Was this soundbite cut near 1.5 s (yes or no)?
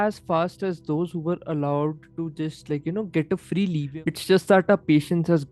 no